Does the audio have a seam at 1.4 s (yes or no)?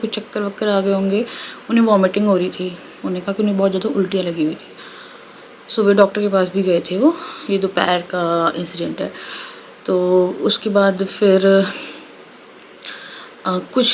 no